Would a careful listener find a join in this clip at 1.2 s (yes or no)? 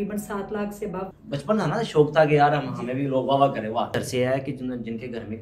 yes